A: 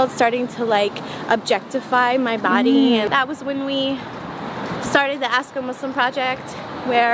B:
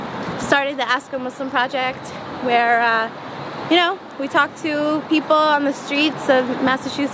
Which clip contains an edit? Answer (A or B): A